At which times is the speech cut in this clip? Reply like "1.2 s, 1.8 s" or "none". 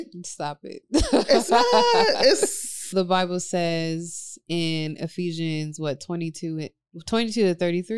2.9 s